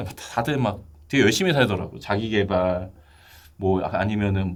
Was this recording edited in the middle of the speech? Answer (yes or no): no